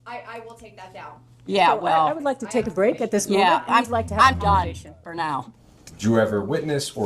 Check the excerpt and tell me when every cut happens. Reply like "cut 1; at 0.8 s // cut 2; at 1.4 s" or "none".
cut 1; at 5.6 s